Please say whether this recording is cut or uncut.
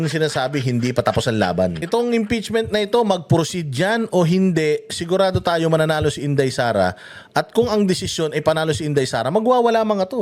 cut